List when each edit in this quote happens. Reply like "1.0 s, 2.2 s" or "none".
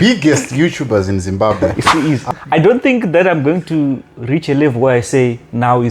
1.6 s